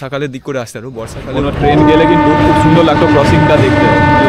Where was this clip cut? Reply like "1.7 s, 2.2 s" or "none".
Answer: 1.2 s